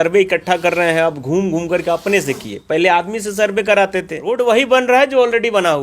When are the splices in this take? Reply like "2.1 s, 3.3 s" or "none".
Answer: 4.2 s